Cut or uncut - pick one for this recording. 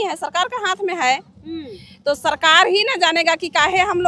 uncut